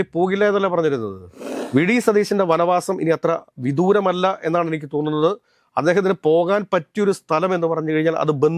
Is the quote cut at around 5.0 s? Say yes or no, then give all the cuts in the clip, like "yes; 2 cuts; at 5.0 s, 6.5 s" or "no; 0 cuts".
no; 1 cut; at 1.5 s